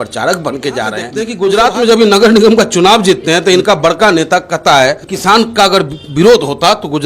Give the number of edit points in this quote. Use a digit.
2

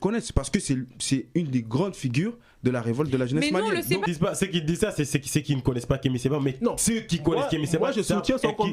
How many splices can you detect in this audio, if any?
1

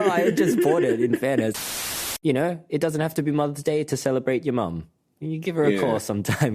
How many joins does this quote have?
1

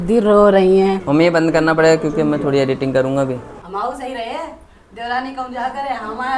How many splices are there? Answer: 2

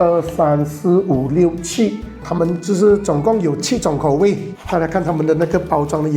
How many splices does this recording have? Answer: 1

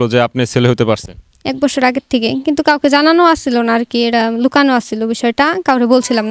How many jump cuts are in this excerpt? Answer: 0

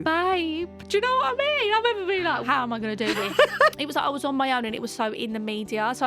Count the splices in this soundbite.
2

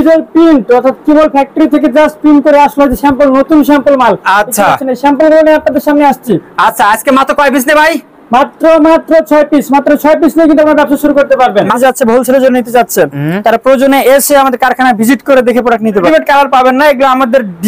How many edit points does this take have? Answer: 2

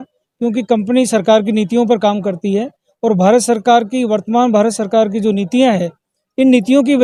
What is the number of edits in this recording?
0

